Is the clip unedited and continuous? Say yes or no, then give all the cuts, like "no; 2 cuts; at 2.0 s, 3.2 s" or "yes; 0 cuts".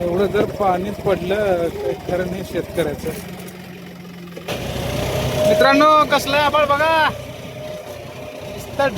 no; 1 cut; at 4.6 s